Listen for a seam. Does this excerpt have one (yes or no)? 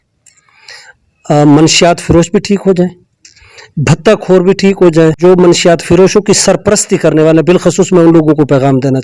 yes